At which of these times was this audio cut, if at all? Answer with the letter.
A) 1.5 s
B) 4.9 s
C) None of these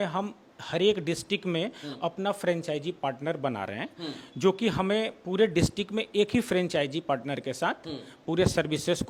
C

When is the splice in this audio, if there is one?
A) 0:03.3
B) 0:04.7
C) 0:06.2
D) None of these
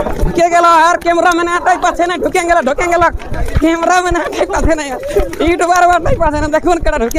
D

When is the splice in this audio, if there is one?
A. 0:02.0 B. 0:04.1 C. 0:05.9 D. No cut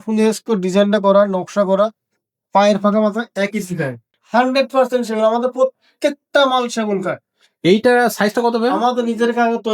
B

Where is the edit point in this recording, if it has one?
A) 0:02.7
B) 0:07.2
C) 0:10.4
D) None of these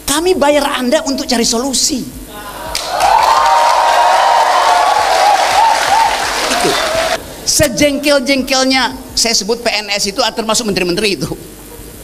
B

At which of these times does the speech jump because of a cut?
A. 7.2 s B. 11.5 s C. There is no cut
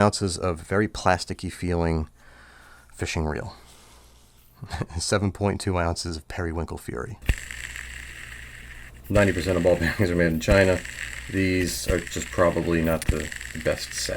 A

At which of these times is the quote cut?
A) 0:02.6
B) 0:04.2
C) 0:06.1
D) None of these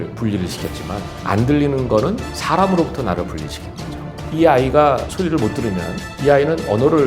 B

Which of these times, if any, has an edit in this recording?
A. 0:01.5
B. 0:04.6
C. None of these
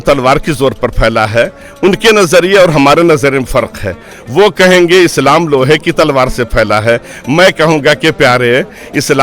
C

